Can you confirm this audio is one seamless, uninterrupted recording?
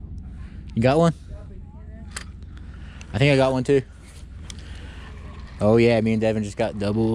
yes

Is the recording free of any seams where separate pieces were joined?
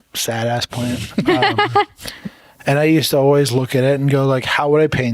yes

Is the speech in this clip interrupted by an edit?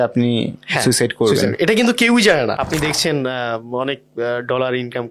yes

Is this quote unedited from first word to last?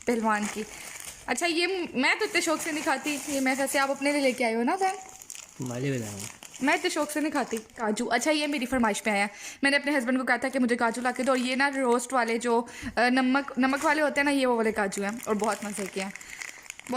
no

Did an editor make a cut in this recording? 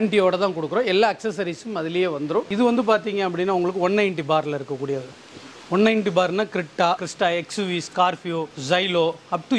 yes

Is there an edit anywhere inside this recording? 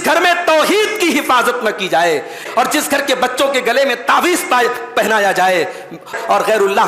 yes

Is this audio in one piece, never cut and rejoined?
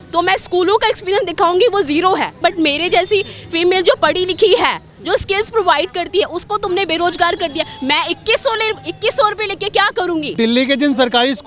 no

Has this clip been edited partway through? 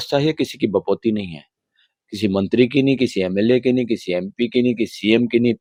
no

